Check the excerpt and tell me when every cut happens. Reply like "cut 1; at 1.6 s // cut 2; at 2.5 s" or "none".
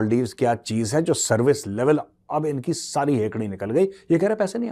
none